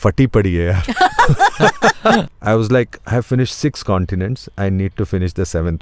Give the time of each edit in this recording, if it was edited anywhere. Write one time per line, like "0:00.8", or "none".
0:02.2